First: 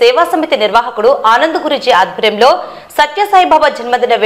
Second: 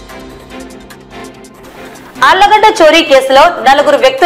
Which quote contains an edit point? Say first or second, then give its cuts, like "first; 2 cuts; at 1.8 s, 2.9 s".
second; 1 cut; at 1.2 s